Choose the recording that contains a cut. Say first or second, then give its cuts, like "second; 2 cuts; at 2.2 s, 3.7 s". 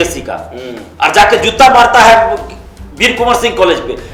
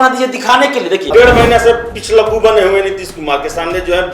second; 1 cut; at 1.1 s